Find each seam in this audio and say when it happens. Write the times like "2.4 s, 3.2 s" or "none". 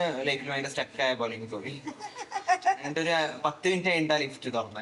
none